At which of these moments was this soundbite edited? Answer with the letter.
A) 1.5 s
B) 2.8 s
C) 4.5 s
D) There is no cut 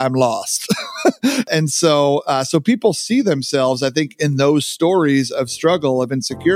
A